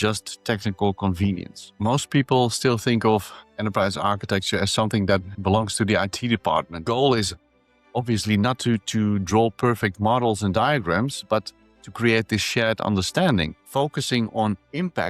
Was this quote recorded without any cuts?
no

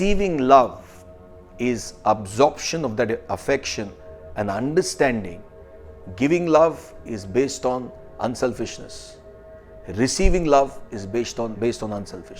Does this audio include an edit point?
yes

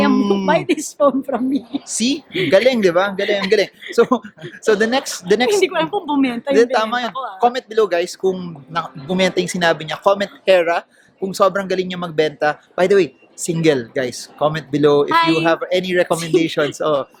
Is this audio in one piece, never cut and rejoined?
yes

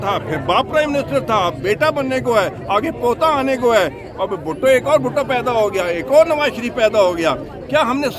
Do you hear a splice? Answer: no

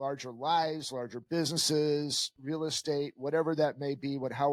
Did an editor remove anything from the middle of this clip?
no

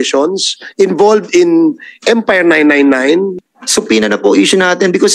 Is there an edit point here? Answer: yes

